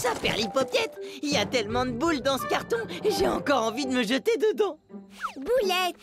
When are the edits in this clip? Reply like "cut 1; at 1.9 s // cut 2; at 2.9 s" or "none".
cut 1; at 5.1 s

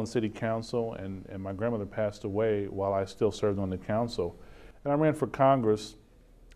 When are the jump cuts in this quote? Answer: cut 1; at 5.3 s

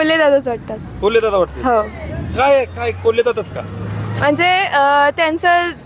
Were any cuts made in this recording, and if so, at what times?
none

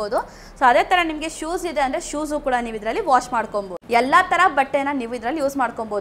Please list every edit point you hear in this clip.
cut 1; at 3.8 s

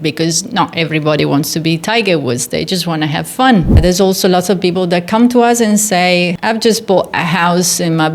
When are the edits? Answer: cut 1; at 3.7 s

